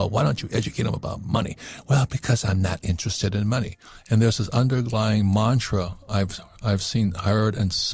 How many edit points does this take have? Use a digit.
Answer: 0